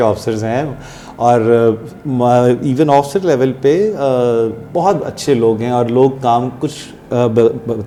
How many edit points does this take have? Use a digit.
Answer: 0